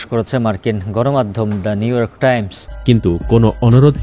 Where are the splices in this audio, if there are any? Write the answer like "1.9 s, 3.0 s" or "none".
2.7 s